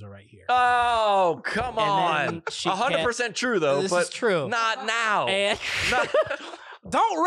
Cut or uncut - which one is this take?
uncut